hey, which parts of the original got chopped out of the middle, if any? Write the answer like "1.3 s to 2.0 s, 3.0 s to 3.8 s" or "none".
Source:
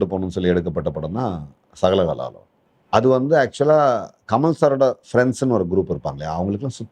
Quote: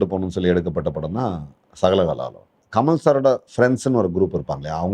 2.6 s to 4.1 s